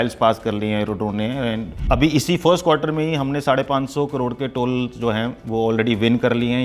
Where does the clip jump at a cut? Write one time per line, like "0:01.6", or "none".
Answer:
0:01.8